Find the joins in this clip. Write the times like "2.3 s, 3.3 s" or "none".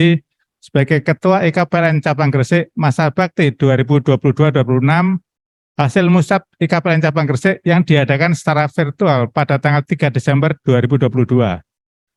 none

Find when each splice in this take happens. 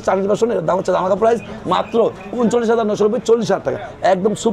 none

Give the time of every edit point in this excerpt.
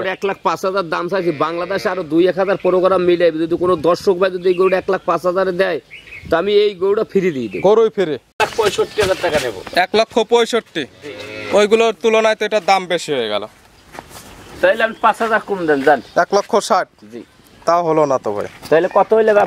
8.4 s

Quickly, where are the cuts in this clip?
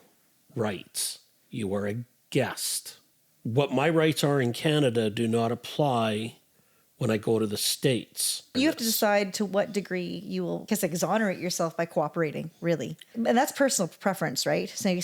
8.5 s, 10.7 s, 13.0 s

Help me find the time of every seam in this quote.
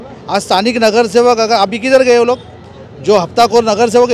none

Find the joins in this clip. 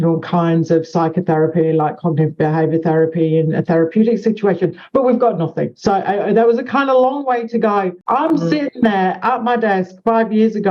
8.0 s

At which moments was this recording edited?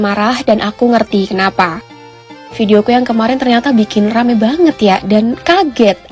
none

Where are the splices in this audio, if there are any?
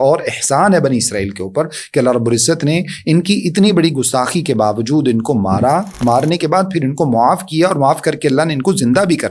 none

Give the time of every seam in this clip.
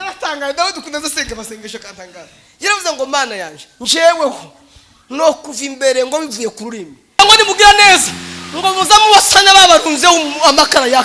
7.2 s

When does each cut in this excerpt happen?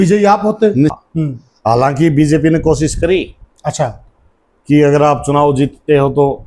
1.0 s

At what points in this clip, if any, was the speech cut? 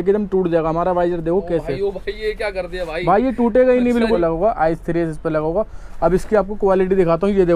4.2 s

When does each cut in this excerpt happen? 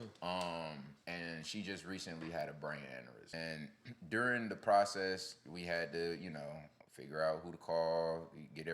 3.3 s

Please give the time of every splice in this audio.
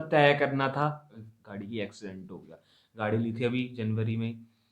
1.0 s

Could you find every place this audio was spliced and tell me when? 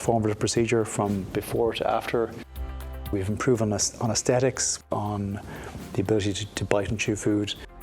none

